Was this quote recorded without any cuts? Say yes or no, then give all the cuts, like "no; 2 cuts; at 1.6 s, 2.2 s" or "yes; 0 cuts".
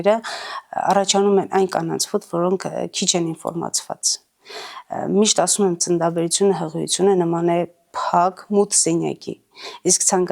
yes; 0 cuts